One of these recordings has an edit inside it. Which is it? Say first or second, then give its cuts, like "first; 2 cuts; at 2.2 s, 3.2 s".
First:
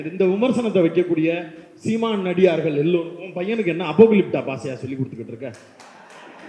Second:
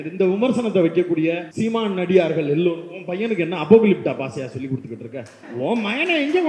second; 2 cuts; at 1.5 s, 5.4 s